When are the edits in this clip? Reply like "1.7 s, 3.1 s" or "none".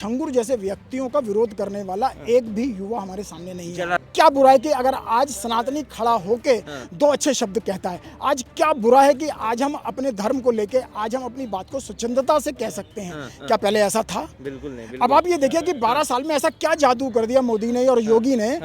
4.0 s